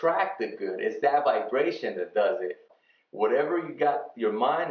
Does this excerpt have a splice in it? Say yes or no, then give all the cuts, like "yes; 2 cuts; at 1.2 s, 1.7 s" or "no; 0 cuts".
yes; 1 cut; at 2.7 s